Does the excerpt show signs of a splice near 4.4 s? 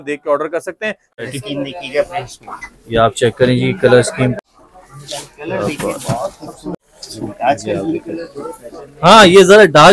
yes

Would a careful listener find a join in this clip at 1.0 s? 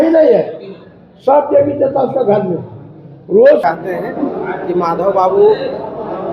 no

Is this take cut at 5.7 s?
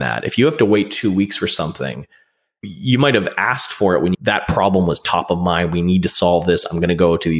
no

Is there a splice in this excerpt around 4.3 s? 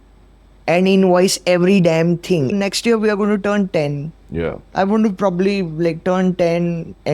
no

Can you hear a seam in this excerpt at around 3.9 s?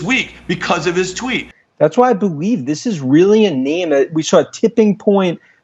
no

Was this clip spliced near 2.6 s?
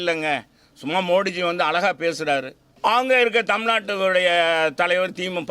yes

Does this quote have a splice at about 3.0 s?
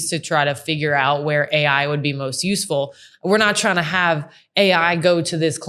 no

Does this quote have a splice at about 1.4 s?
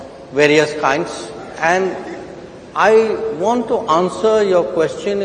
yes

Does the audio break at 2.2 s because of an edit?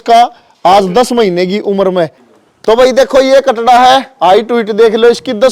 yes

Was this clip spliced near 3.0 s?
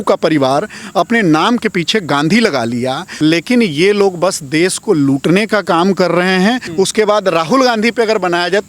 yes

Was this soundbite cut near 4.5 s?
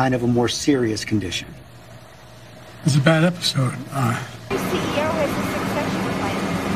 yes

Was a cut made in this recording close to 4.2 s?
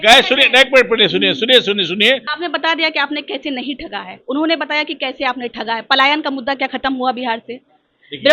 no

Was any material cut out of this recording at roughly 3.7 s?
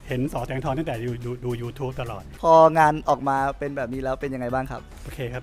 no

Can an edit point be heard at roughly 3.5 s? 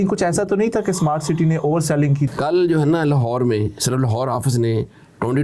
no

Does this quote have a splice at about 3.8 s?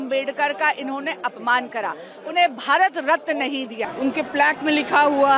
yes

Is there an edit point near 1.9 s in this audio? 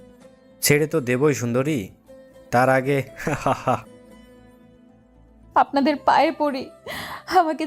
no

